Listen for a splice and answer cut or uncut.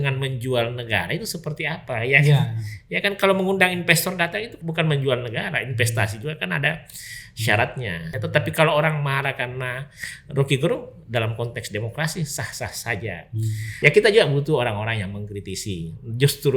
cut